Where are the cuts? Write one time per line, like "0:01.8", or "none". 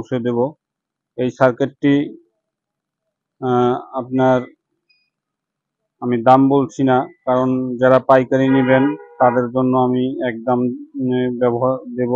none